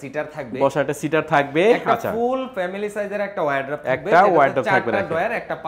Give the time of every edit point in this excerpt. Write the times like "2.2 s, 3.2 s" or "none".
none

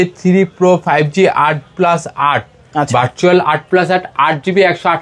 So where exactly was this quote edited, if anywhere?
none

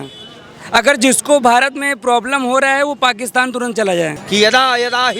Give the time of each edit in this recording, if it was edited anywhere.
4.2 s

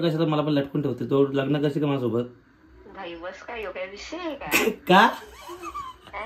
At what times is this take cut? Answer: none

